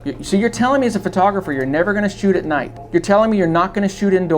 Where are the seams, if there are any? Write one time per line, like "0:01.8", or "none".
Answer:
0:02.8